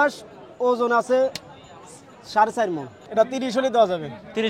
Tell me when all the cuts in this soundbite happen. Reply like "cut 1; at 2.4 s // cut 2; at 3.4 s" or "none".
cut 1; at 2.9 s